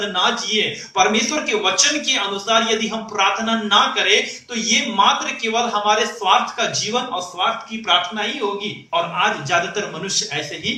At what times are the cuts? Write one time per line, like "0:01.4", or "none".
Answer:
none